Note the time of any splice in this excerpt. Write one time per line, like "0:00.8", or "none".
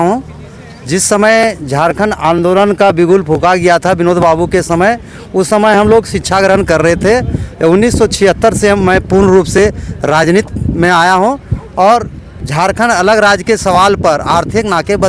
none